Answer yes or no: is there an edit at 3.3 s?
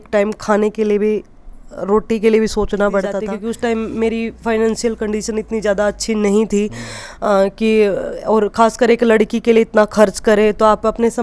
yes